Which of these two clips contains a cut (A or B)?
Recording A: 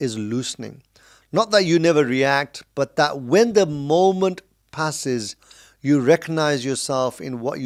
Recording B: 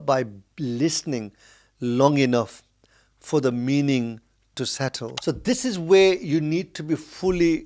B